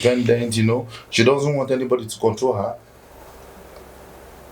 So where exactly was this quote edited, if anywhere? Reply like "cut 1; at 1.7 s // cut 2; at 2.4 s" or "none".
none